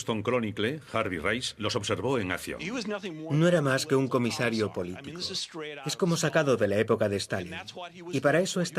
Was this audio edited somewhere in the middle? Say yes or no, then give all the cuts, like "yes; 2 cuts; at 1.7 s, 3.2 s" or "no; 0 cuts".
no; 0 cuts